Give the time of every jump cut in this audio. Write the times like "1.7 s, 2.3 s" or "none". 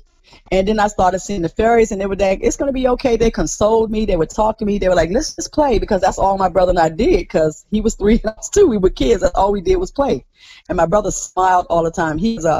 none